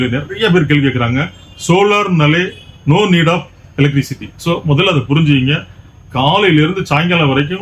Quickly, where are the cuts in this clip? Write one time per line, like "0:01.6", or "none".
none